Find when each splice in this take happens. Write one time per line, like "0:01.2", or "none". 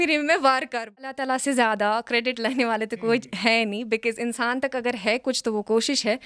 0:01.1